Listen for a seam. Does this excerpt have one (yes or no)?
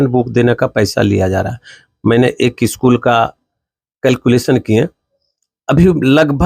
no